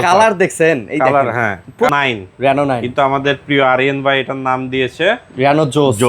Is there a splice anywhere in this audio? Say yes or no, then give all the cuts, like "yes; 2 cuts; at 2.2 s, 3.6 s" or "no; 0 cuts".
yes; 1 cut; at 1.9 s